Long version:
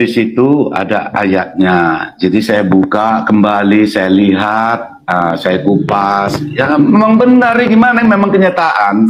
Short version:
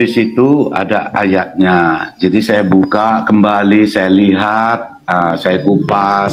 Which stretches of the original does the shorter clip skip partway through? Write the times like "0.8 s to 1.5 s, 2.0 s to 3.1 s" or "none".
none